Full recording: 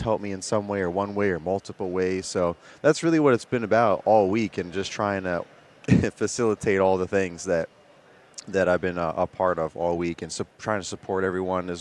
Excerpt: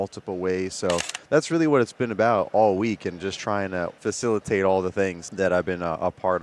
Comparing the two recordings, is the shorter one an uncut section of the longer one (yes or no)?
no